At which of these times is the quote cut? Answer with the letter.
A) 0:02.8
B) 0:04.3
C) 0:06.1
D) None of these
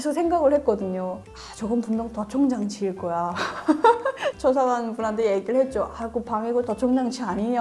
B